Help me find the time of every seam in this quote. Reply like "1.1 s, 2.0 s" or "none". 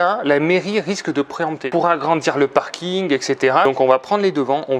1.6 s, 3.6 s